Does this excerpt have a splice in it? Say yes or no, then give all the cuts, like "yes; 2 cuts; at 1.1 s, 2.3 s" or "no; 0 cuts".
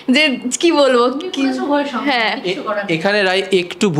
no; 0 cuts